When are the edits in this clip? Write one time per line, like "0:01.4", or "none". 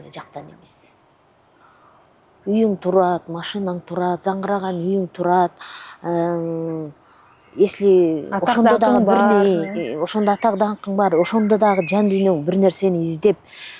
none